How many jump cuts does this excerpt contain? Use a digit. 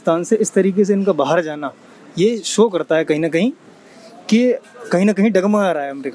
0